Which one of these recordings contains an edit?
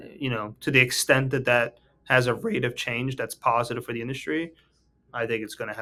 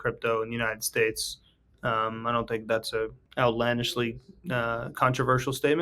second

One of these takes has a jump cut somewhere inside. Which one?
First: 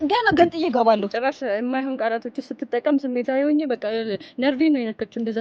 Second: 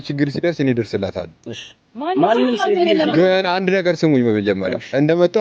first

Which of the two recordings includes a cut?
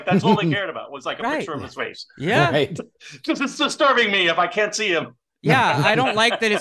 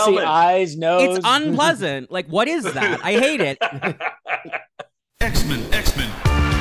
second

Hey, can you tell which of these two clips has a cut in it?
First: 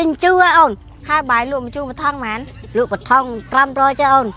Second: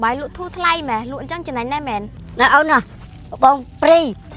first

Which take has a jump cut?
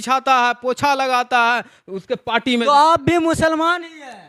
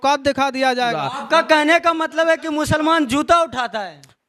second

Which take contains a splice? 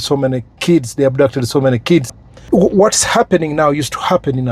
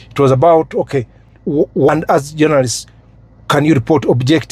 first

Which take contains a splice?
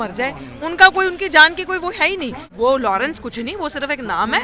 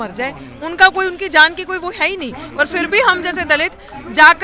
first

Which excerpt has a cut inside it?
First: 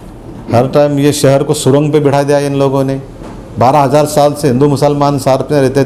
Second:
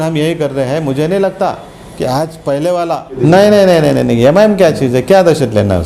second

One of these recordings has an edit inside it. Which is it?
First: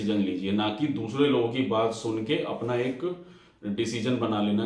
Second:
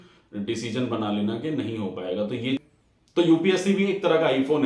second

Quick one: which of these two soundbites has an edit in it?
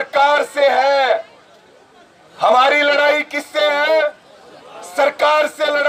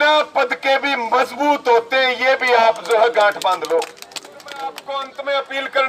second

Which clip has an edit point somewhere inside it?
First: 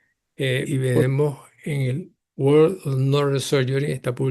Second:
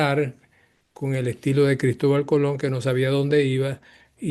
first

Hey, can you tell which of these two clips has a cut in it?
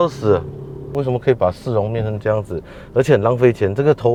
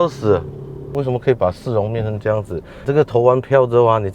second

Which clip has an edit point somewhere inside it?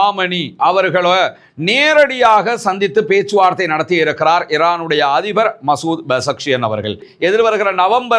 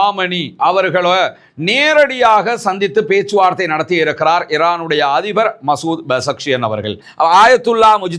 first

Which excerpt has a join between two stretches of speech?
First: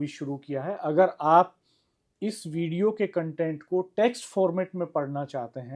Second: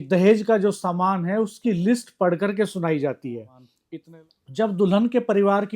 second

